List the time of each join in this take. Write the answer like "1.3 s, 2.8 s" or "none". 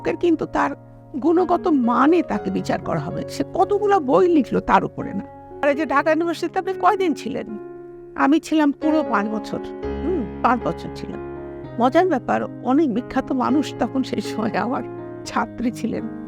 5.6 s